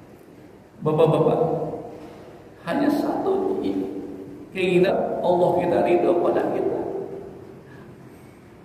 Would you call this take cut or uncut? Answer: cut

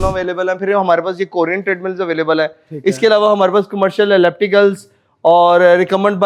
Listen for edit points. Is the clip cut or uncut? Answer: uncut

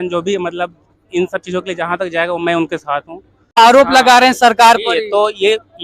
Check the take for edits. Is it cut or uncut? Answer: cut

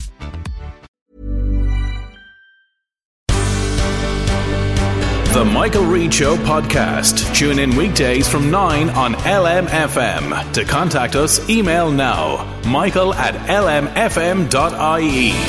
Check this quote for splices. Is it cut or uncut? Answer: cut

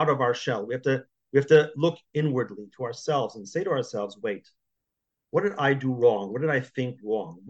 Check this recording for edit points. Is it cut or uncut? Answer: cut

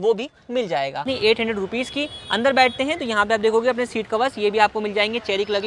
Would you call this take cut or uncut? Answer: cut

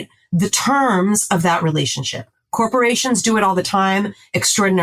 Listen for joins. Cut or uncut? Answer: uncut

